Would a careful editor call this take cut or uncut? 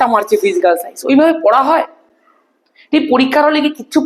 uncut